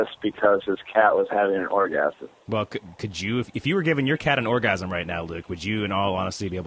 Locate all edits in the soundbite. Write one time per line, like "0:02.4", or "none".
none